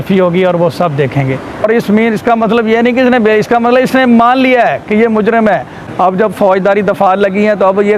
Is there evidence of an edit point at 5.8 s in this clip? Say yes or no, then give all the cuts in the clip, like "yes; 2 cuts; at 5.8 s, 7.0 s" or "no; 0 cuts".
yes; 2 cuts; at 1.6 s, 5.8 s